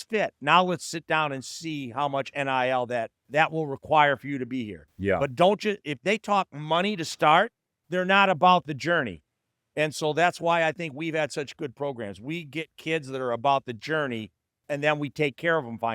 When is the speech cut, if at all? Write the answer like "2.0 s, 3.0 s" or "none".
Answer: 3.2 s, 7.9 s